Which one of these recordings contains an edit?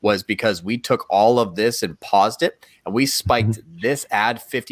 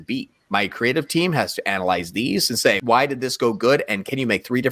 second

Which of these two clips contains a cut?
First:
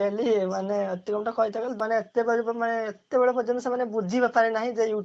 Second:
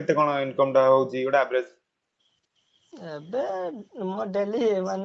first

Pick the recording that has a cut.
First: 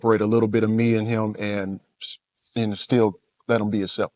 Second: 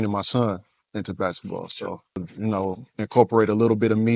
second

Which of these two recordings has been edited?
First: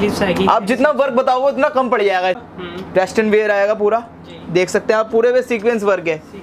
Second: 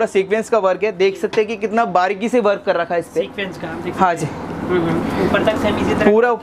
first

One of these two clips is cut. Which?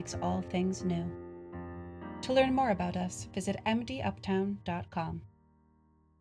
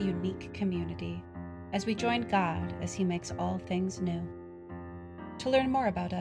first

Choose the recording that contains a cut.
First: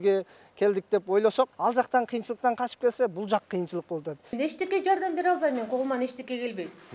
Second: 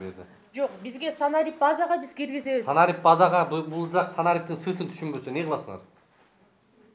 first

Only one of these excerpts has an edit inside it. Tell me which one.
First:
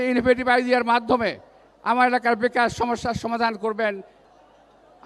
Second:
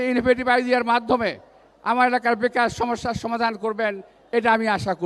first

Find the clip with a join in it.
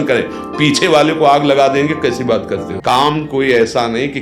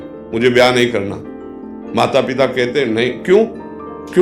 first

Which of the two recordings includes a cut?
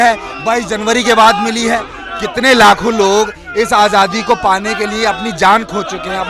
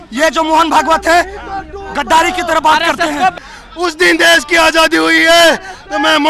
second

